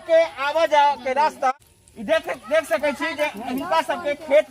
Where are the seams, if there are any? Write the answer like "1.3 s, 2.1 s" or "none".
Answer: 1.7 s